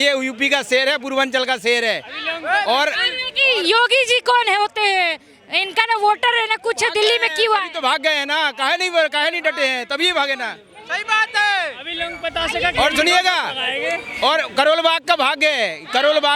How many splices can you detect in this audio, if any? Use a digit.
0